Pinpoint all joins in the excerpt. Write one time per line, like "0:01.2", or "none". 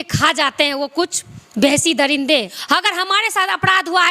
0:02.5